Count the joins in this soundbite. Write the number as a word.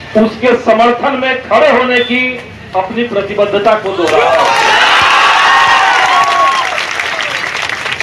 zero